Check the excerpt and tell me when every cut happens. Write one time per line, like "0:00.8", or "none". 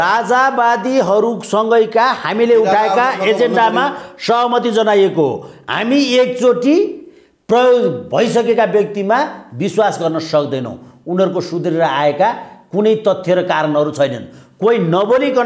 none

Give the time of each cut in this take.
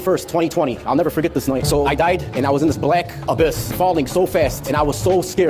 0:01.6

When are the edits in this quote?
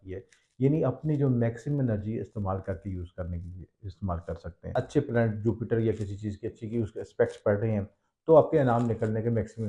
0:04.6

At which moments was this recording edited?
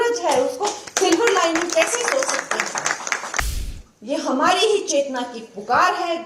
0:03.5

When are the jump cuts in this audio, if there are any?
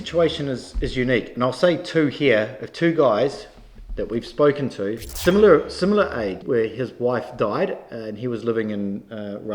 0:05.1
0:06.4

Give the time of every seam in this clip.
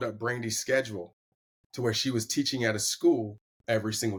none

